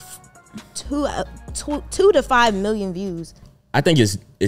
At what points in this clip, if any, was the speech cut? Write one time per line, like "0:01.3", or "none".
0:03.4